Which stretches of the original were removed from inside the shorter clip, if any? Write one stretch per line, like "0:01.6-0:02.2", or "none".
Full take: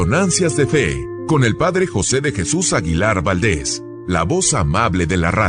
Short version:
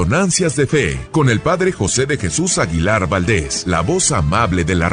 0:01.0-0:01.1
0:03.7-0:04.0